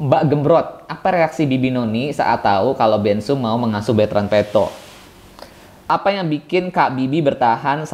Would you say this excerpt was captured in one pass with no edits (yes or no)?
no